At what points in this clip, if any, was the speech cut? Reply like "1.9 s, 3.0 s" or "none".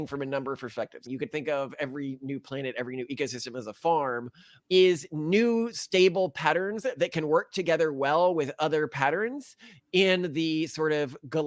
1.0 s